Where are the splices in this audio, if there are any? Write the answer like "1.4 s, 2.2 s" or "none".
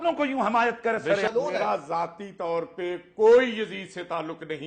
1.3 s